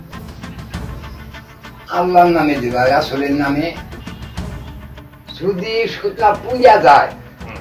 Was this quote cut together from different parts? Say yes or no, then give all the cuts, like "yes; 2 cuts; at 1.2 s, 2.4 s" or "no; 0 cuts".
no; 0 cuts